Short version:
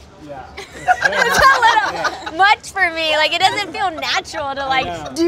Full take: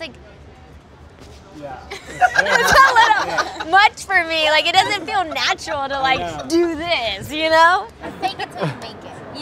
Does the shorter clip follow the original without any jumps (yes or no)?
yes